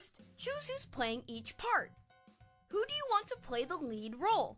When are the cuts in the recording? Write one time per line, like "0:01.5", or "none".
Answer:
none